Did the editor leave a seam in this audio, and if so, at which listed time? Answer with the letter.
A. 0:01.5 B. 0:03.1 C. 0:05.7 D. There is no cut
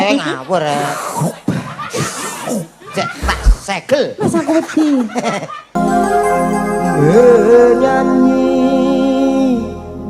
C